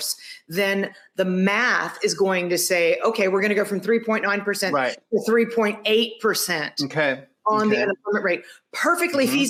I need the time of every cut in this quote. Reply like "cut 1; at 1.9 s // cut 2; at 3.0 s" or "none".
none